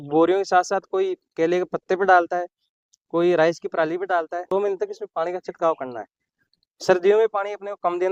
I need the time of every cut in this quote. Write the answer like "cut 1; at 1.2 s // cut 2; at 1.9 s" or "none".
cut 1; at 4.5 s